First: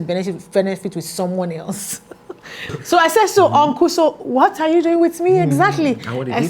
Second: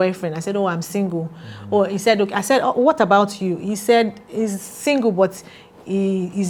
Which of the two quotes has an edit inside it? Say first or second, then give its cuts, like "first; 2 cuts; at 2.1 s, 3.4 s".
first; 1 cut; at 2.7 s